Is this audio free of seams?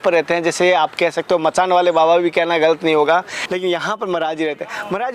no; 1 cut; at 3.4 s

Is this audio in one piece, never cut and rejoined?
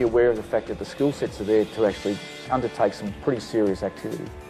no; 1 cut; at 3.6 s

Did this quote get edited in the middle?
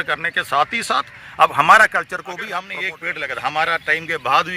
yes; 1 cut; at 2.6 s

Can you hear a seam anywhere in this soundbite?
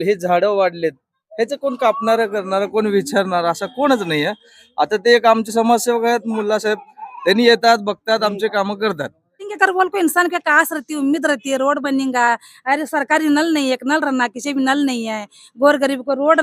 yes; 1 cut; at 9.5 s

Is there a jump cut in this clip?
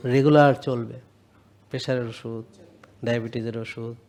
no; 0 cuts

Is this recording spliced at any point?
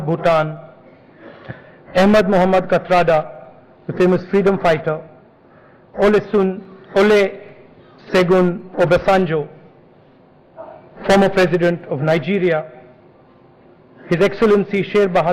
yes; 1 cut; at 4.1 s

